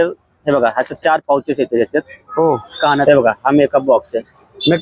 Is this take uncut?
no; 1 cut; at 3.0 s

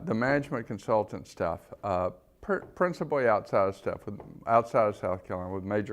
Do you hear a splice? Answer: yes; 1 cut; at 3.5 s

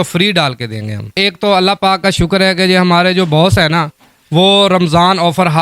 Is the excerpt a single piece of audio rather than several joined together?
no; 1 cut; at 1.1 s

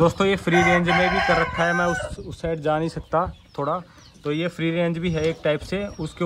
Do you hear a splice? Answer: no; 0 cuts

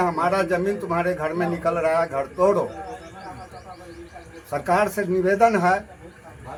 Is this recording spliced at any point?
no; 0 cuts

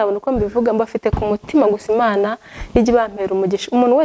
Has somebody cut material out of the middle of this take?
no; 0 cuts

